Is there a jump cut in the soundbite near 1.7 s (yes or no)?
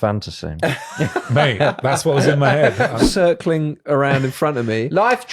no